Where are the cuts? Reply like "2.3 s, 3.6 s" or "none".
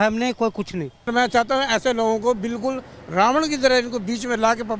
1.1 s